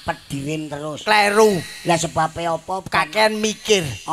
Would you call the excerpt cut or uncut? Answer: cut